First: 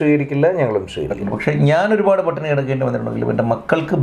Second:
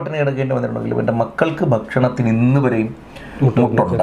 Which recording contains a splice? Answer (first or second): first